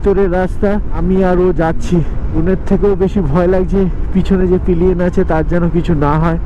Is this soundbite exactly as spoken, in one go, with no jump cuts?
yes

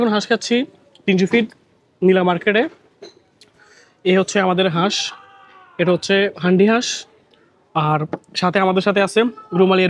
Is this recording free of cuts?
yes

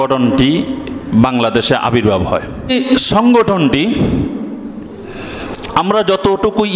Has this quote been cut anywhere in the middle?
yes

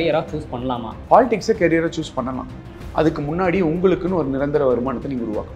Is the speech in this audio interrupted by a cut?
yes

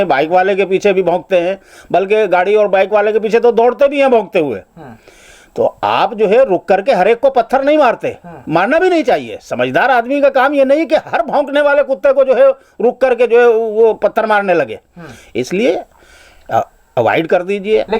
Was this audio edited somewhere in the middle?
no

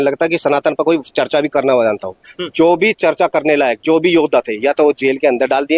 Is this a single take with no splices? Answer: yes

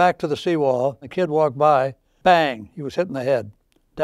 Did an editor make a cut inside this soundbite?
yes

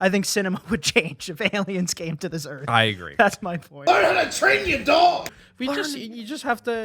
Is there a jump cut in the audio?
yes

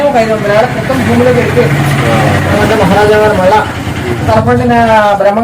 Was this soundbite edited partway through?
yes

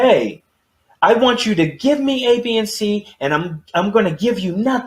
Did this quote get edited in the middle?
no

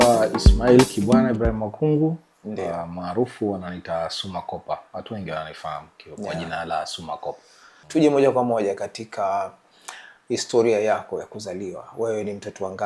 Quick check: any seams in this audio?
no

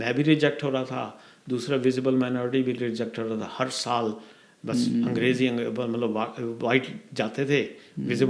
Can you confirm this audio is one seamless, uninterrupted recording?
yes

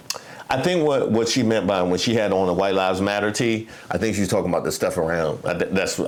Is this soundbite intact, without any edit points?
yes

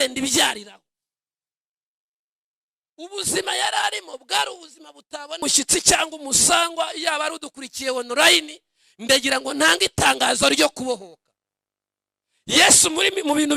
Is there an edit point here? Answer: yes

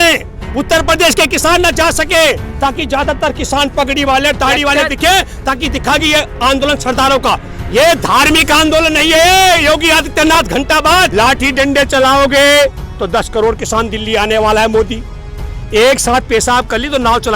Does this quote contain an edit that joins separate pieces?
yes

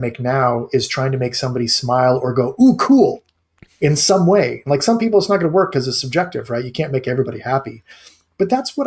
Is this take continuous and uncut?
yes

